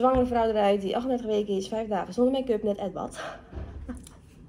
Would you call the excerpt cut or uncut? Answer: uncut